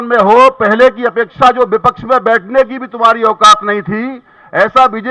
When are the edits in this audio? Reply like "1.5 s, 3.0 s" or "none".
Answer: none